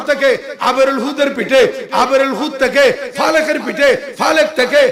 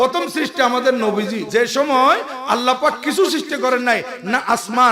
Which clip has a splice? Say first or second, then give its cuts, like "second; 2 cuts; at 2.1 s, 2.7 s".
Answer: second; 1 cut; at 1.4 s